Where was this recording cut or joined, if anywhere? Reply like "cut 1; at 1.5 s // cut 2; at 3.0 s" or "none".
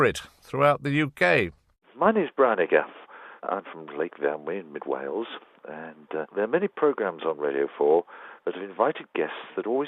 none